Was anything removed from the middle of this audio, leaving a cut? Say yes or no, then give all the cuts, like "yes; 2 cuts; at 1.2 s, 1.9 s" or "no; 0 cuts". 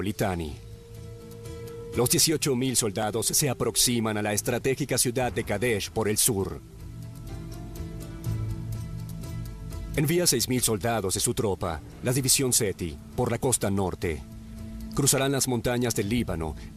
yes; 1 cut; at 1.5 s